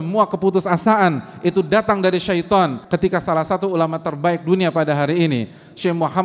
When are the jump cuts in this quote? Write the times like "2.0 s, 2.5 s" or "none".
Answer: 2.8 s